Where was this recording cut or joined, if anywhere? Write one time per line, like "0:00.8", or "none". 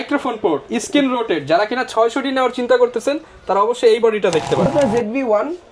0:04.7